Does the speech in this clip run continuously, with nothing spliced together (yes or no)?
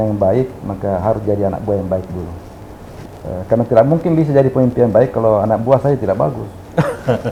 yes